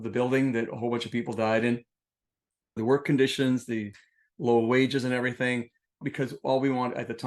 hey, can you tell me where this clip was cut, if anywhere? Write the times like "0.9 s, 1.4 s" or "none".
2.8 s